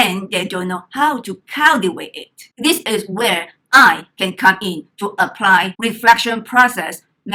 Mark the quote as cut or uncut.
uncut